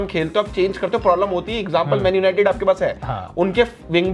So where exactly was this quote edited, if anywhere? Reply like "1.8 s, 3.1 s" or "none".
none

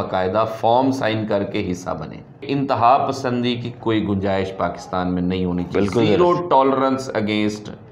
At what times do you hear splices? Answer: 2.4 s

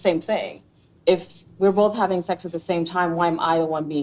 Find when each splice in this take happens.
1.0 s

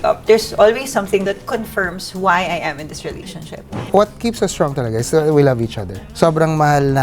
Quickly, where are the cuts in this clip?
3.7 s

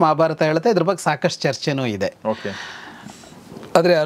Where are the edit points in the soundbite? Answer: none

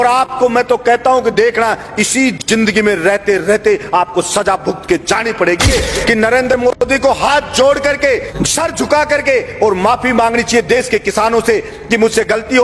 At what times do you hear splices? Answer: 5.7 s, 8.3 s

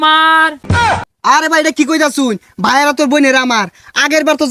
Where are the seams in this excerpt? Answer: 0.9 s

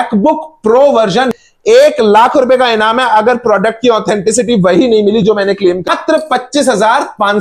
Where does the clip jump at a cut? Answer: 1.3 s, 5.9 s

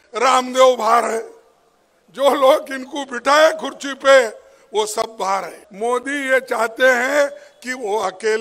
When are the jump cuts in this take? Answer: 5.6 s

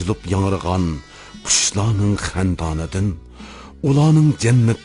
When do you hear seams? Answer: 2.3 s

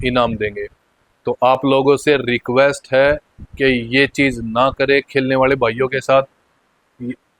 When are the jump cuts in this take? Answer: none

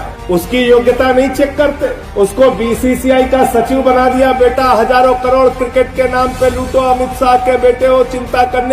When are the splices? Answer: none

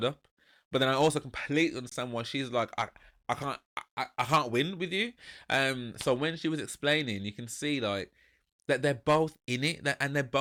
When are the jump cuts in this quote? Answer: none

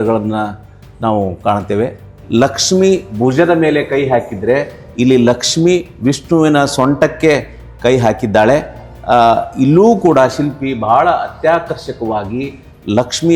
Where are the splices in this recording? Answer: 2.1 s

